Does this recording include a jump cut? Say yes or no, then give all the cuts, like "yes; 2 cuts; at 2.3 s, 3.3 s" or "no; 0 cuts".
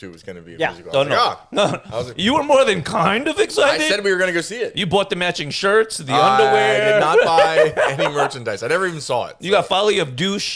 no; 0 cuts